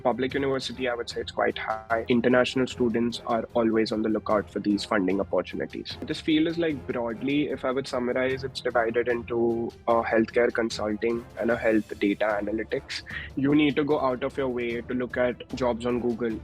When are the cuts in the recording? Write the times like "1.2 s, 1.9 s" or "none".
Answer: 2.0 s, 6.1 s, 13.3 s